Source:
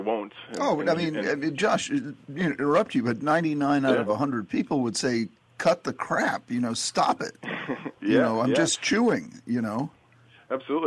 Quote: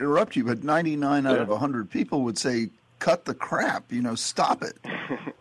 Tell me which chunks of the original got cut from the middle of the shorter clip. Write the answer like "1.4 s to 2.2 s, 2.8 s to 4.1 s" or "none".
none